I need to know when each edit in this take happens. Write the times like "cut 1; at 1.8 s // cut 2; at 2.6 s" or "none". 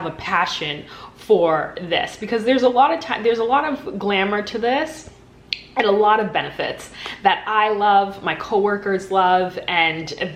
none